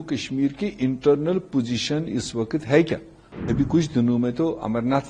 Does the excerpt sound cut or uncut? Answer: cut